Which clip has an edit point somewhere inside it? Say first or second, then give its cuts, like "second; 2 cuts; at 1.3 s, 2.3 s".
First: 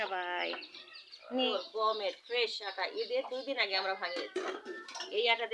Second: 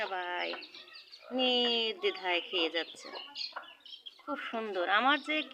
first; 1 cut; at 1.5 s